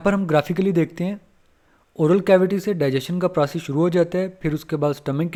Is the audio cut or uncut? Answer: uncut